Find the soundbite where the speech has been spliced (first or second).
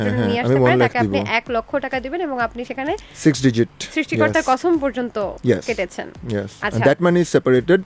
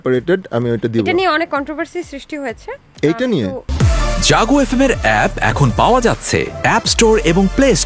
second